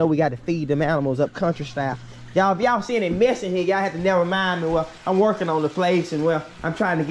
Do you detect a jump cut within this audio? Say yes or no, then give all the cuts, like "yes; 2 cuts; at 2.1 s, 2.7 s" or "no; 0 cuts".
no; 0 cuts